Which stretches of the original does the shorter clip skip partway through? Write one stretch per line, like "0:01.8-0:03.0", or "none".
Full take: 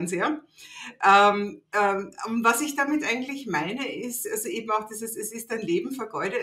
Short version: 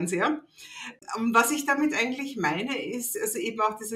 0:00.9-0:02.0

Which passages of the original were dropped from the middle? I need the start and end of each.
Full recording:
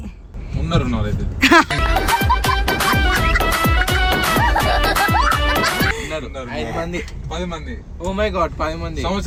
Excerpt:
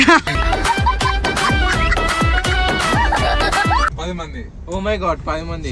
0:05.3-0:07.2

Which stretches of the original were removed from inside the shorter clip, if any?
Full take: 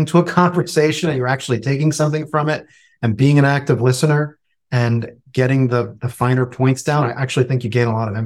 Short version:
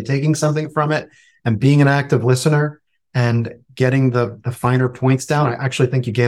none

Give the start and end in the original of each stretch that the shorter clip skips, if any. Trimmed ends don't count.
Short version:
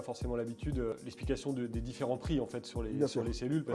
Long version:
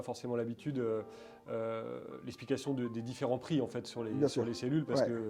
0:00.9-0:02.1

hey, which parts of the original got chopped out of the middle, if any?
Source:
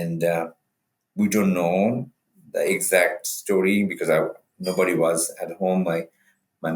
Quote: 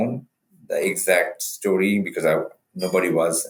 none

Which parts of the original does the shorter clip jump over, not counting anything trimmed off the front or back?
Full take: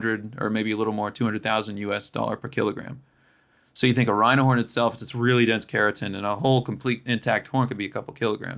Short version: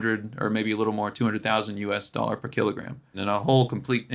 0:03.1-0:06.1

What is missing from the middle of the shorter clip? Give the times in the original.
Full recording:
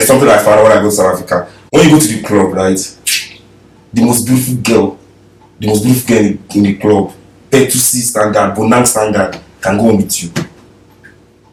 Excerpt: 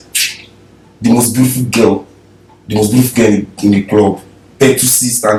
none

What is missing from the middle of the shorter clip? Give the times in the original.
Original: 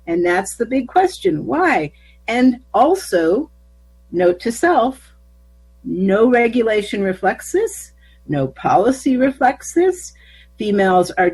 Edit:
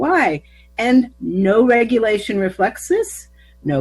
0:02.6-0:05.8

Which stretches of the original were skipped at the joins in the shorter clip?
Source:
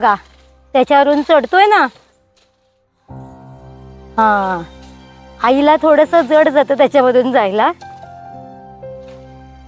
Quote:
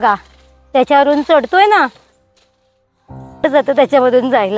0:03.4-0:06.4

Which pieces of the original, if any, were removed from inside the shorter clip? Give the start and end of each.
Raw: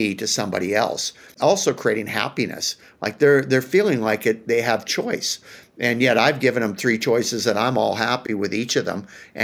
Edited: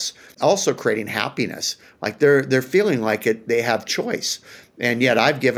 none

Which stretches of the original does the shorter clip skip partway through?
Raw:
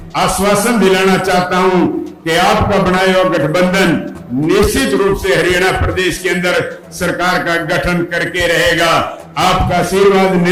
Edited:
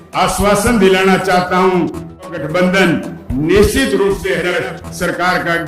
0:02.3-0:03.3
0:05.3-0:06.3

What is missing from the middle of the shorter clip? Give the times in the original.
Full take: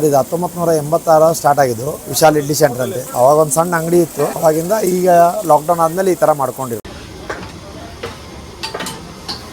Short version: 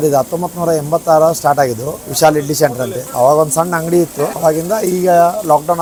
none

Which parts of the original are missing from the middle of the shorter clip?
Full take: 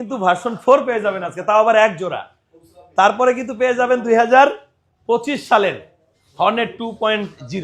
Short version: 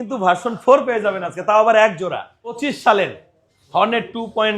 0:02.7-0:05.3

